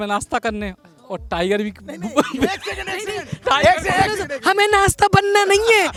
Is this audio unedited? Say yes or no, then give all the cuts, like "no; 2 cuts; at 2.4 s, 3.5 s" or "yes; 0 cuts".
yes; 0 cuts